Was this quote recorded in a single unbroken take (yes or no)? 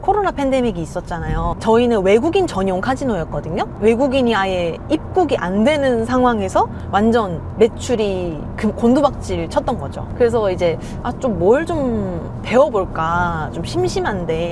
no